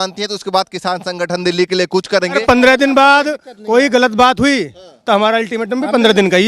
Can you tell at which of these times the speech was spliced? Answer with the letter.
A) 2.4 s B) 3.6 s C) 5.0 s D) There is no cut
A